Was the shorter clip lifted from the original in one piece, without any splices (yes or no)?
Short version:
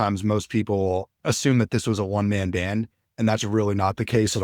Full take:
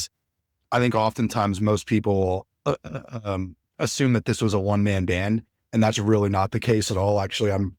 no